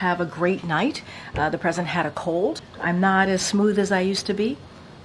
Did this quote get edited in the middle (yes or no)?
yes